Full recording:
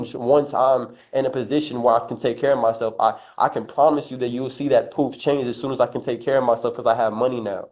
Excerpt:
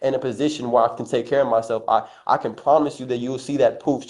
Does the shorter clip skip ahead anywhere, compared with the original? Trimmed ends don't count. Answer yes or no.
no